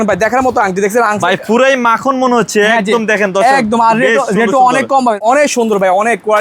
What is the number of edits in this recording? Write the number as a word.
one